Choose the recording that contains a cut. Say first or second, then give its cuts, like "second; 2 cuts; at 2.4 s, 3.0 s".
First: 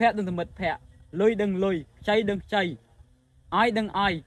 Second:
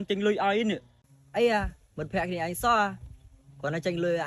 second; 1 cut; at 1.0 s